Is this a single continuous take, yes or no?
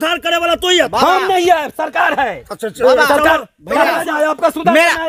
yes